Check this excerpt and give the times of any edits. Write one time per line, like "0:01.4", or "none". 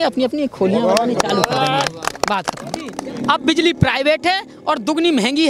0:03.0